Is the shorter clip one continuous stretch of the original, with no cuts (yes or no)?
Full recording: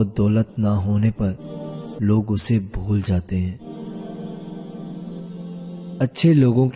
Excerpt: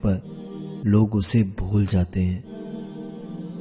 no